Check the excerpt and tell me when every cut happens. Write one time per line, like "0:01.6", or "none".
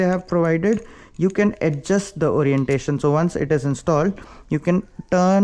none

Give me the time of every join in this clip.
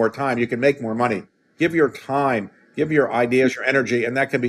0:01.4

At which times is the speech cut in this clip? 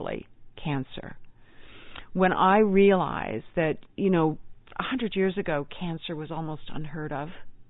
none

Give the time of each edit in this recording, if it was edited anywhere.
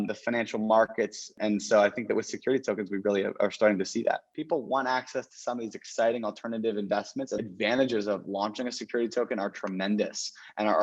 0:04.3
0:07.4

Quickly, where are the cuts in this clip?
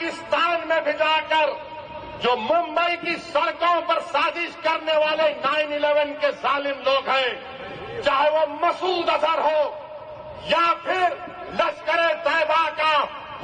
none

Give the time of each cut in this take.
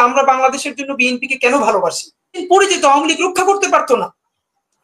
0:02.4

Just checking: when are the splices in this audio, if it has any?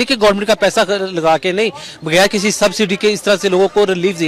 none

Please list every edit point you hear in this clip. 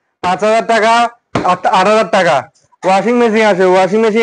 none

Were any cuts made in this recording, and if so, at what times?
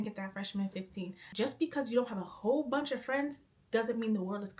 0:01.2

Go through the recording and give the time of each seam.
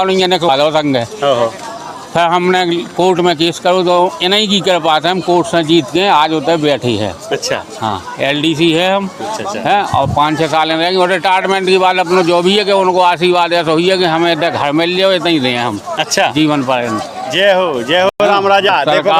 none

